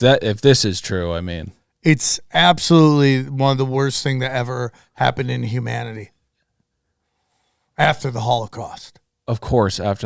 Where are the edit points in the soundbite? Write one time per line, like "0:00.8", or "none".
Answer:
none